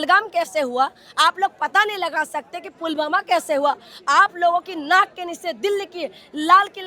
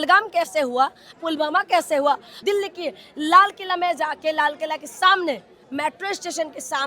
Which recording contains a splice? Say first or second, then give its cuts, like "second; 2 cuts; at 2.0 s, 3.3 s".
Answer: second; 2 cuts; at 1.0 s, 2.3 s